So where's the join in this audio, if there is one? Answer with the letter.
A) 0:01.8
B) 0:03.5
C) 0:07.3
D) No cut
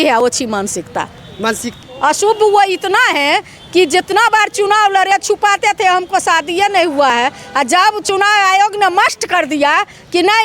A